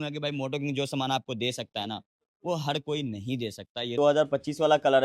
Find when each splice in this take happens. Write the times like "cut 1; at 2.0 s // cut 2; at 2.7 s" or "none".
cut 1; at 3.9 s